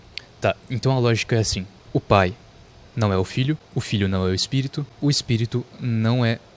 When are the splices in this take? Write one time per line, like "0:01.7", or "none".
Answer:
none

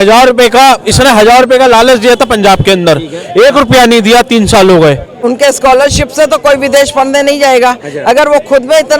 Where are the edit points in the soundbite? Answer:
0:05.2

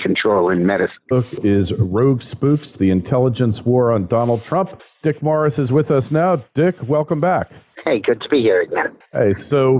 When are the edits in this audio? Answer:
none

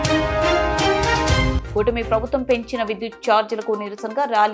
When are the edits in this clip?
none

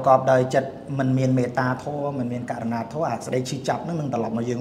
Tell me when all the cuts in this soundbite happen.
none

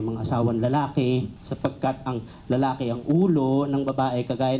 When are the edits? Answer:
0:01.4

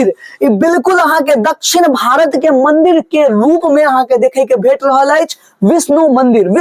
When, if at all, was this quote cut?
none

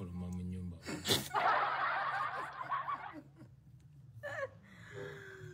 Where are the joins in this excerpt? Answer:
0:01.3
0:03.0

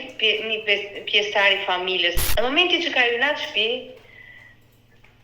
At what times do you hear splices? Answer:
0:02.2

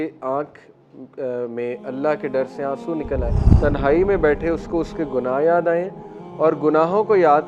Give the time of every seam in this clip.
0:03.4

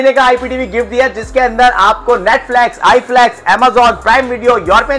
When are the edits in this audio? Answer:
none

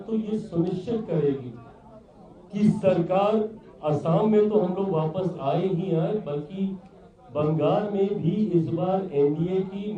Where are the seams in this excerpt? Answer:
none

